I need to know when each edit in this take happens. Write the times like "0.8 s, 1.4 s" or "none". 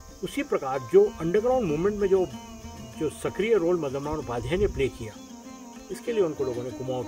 none